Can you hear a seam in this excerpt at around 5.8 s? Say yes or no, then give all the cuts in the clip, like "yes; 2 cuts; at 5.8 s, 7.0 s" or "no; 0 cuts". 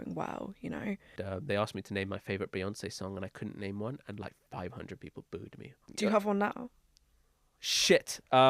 yes; 2 cuts; at 1.1 s, 5.8 s